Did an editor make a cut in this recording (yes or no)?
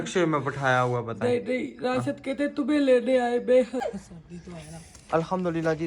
yes